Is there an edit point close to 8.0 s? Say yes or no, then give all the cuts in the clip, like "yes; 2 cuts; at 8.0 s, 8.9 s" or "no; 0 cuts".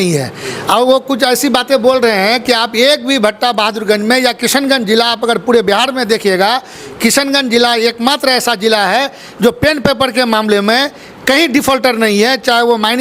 no; 0 cuts